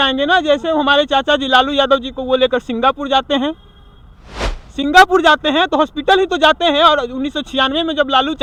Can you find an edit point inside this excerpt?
no; 0 cuts

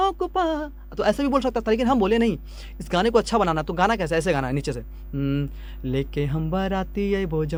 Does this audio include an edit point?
no; 0 cuts

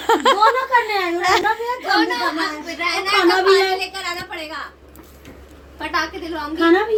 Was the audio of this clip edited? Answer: no; 0 cuts

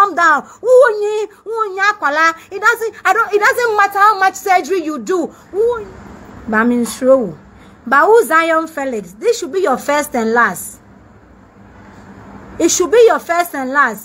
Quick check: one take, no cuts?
no; 1 cut; at 5.9 s

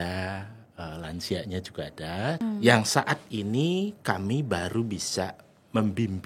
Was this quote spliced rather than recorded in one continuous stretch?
yes; 1 cut; at 2.4 s

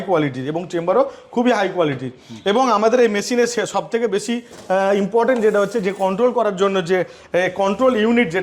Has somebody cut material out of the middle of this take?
no; 0 cuts

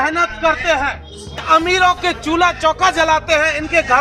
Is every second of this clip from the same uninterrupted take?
no; 1 cut; at 1.4 s

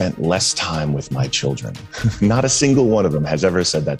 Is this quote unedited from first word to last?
yes; 0 cuts

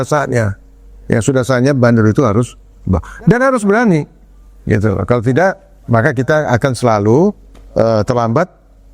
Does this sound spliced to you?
no; 0 cuts

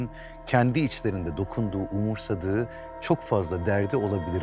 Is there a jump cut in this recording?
no; 0 cuts

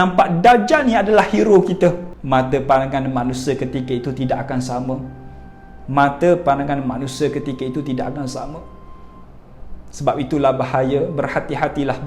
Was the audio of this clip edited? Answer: no; 0 cuts

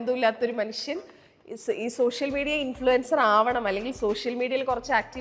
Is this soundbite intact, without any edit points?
yes; 0 cuts

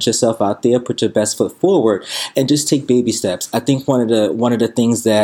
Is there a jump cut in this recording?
no; 0 cuts

